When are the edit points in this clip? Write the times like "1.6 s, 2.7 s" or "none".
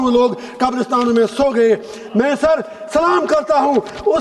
none